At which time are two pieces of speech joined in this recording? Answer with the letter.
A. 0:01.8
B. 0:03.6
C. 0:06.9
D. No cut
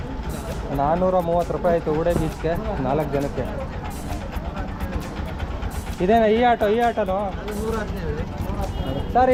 D